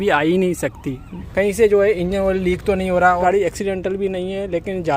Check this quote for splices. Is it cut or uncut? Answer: cut